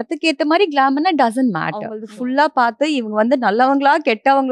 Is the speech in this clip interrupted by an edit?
yes; 1 cut; at 2.0 s

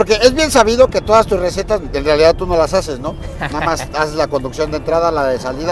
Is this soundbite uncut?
yes; 0 cuts

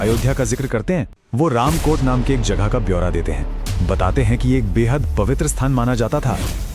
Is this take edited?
yes; 1 cut; at 1.2 s

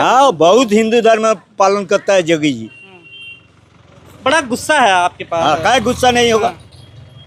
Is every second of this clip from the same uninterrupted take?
yes; 0 cuts

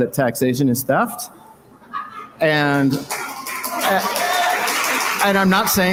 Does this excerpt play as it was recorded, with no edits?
yes; 0 cuts

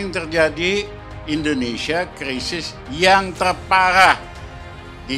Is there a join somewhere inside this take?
no; 0 cuts

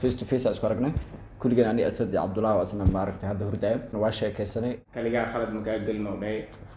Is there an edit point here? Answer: yes; 1 cut; at 4.8 s

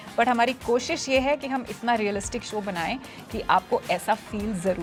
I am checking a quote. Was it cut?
no; 0 cuts

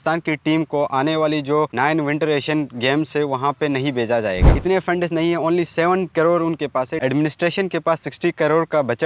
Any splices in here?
yes; 2 cuts; at 4.6 s, 7.0 s

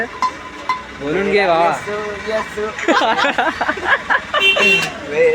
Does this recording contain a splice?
yes; 1 cut; at 4.0 s

